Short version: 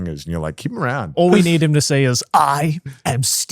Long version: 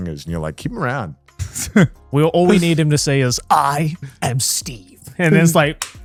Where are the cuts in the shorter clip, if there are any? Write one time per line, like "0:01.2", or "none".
0:01.2